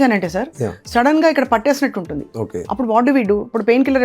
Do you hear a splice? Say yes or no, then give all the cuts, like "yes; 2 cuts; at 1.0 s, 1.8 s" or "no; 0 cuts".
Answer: yes; 1 cut; at 2.6 s